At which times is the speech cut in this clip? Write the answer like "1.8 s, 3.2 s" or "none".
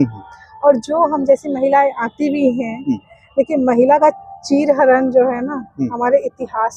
none